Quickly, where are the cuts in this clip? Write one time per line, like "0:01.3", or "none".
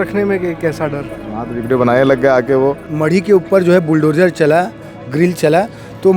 0:02.8